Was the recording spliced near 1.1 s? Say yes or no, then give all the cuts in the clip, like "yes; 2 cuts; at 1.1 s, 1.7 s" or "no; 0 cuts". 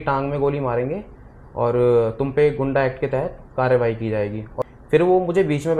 no; 1 cut; at 4.5 s